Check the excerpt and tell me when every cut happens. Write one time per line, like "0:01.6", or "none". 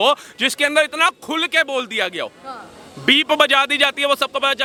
none